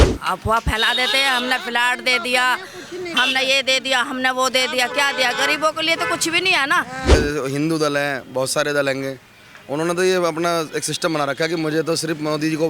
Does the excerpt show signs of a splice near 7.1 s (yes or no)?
yes